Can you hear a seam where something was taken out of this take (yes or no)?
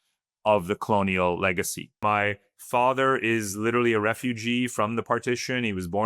yes